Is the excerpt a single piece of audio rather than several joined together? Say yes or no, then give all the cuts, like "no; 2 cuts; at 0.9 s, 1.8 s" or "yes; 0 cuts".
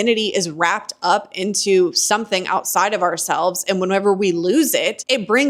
yes; 0 cuts